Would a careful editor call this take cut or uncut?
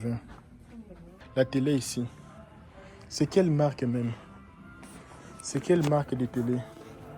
cut